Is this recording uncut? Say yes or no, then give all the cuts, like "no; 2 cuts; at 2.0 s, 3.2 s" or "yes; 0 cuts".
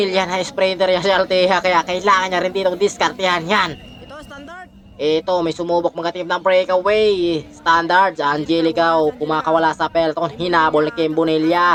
yes; 0 cuts